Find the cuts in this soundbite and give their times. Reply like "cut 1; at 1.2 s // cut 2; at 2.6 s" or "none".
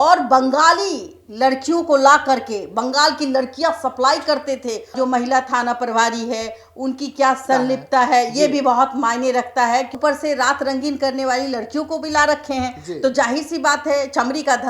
cut 1; at 4.9 s // cut 2; at 7.4 s // cut 3; at 9.9 s